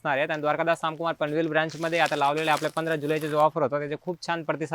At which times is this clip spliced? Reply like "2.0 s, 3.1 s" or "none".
none

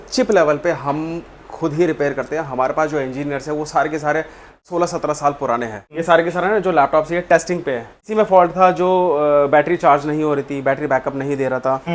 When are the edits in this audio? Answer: 4.6 s, 5.8 s, 8.0 s

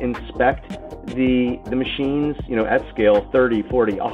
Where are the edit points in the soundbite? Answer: none

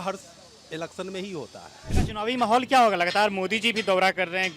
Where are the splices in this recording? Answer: 1.9 s

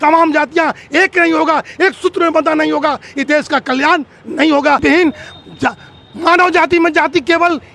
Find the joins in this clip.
4.8 s

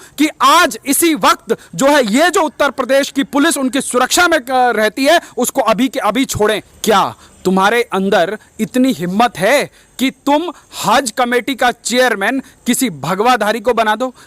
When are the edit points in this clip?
6.7 s

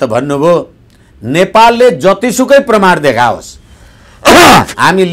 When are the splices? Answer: none

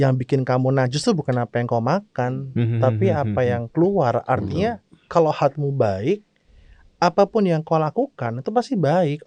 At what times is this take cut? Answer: none

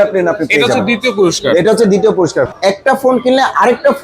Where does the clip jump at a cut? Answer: 2.5 s

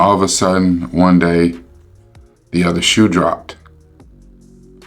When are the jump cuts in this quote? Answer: 3.8 s

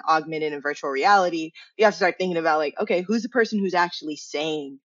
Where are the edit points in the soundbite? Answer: none

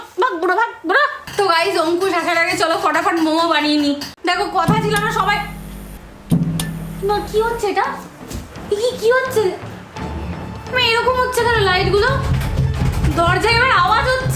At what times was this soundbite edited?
1.2 s, 4.1 s

